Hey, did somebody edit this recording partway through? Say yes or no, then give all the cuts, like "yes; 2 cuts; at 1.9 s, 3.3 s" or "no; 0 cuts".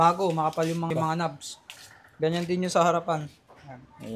yes; 1 cut; at 0.9 s